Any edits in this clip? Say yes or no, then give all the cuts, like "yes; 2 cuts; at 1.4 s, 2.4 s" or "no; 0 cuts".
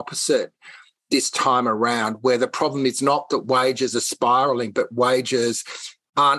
no; 0 cuts